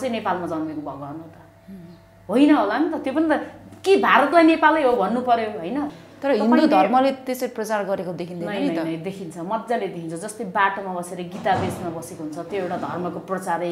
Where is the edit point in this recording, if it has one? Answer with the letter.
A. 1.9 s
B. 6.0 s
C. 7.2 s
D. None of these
B